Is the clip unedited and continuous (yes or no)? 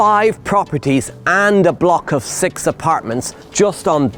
yes